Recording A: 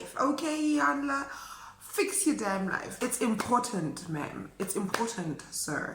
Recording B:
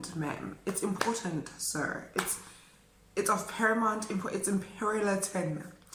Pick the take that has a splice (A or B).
A